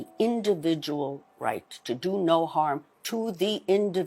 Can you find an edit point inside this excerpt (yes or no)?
no